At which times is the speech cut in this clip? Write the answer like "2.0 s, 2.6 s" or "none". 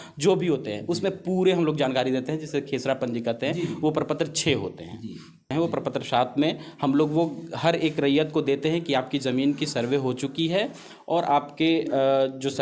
5.5 s

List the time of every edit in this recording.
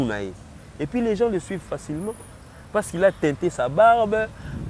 none

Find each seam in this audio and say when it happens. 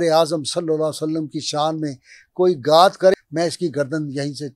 3.1 s

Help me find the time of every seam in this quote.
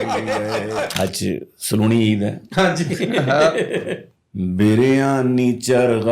1.0 s

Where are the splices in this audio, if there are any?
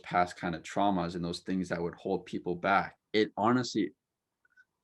3.0 s

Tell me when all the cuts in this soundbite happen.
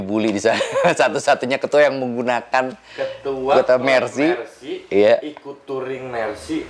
none

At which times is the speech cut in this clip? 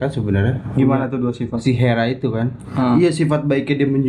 none

